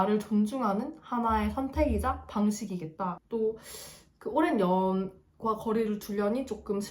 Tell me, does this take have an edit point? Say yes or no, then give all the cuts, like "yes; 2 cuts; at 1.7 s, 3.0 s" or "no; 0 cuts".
yes; 1 cut; at 3.2 s